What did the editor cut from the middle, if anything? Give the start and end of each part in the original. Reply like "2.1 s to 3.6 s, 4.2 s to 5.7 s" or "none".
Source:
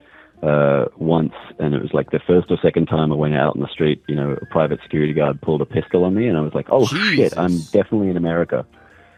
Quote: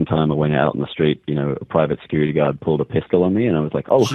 none